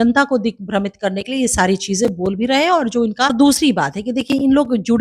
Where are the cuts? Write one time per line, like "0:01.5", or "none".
0:03.3